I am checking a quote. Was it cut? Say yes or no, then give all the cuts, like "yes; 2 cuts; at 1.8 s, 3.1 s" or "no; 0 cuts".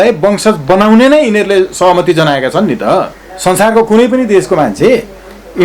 yes; 1 cut; at 3.2 s